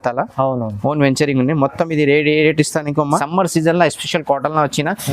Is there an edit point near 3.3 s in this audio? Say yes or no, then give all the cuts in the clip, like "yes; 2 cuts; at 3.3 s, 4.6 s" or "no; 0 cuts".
yes; 1 cut; at 3.3 s